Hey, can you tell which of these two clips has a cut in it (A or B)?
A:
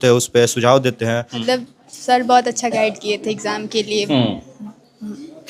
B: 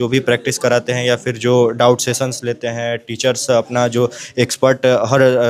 A